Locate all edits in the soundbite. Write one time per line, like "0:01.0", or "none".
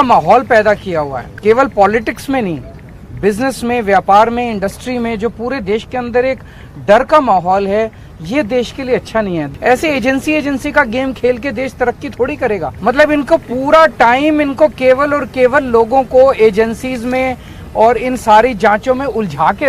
0:01.2
0:09.5
0:12.7